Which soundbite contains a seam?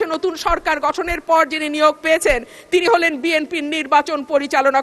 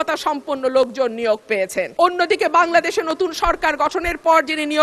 second; 1 cut; at 1.9 s

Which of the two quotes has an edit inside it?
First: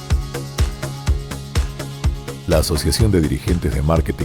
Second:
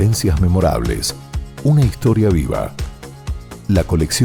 first; 1 cut; at 2.0 s

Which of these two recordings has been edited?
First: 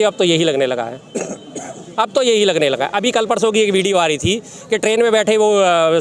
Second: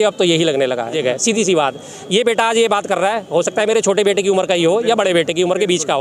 second; 1 cut; at 0.9 s

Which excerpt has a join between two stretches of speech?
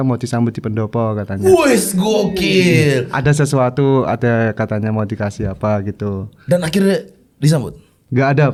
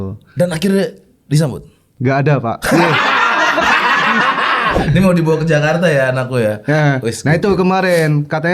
second; 1 cut; at 4.8 s

